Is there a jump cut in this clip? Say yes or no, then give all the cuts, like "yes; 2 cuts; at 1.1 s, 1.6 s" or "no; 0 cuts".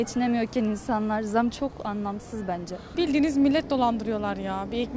yes; 1 cut; at 2.8 s